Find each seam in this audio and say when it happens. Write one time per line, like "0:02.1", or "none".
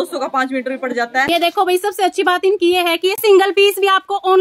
0:00.9